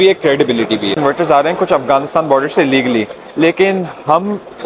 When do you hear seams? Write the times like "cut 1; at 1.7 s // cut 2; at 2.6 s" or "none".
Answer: cut 1; at 1.0 s